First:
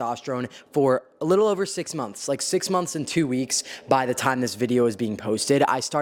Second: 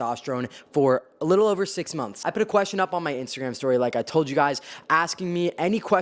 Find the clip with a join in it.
second; 1 cut; at 2.1 s

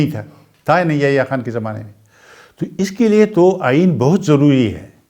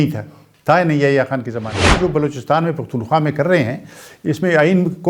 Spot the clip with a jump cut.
second; 1 cut; at 2.0 s

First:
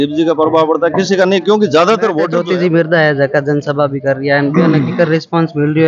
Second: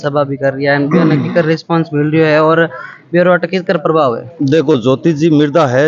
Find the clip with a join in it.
first; 1 cut; at 2.4 s

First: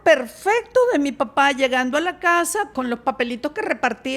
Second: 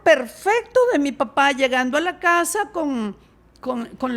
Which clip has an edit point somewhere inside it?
first; 1 cut; at 2.7 s

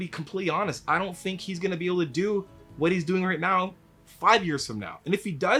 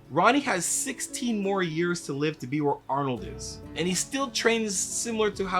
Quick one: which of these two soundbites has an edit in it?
second; 1 cut; at 3.7 s

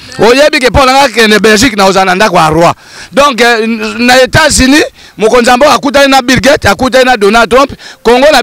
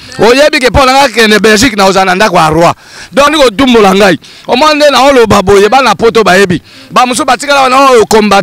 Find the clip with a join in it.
second; 1 cut; at 3.3 s

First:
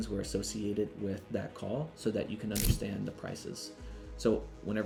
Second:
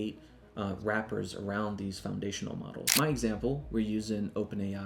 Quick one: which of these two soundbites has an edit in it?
second; 1 cut; at 2.8 s

